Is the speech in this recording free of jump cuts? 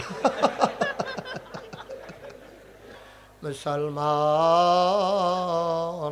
no; 1 cut; at 3.0 s

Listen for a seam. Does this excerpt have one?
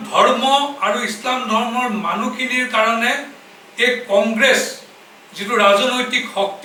no; 0 cuts

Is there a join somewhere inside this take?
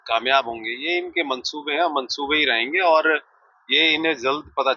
no; 0 cuts

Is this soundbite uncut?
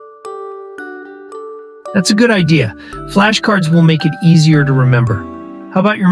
no; 1 cut; at 1.9 s

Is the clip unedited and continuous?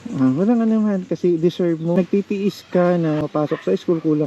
no; 2 cuts; at 2.0 s, 3.2 s

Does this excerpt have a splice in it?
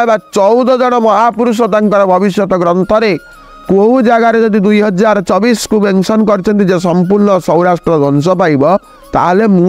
no; 0 cuts

